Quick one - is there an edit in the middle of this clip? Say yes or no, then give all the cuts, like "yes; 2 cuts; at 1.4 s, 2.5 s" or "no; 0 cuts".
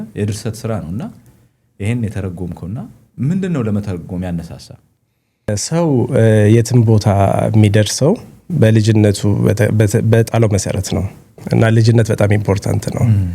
yes; 1 cut; at 5.6 s